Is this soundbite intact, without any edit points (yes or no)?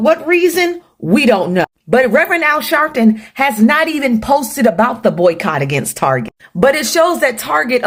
yes